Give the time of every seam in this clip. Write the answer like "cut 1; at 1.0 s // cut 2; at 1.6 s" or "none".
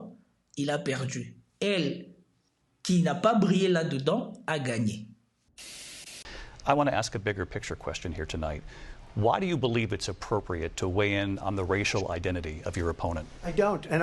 cut 1; at 5.9 s